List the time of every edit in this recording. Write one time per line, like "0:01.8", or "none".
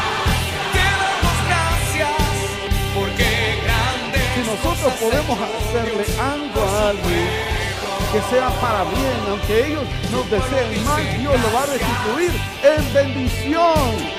none